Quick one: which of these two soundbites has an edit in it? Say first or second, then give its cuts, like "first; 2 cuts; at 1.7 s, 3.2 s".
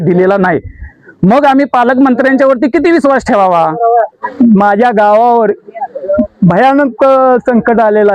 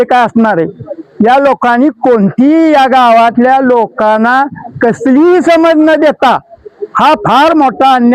first; 1 cut; at 4.2 s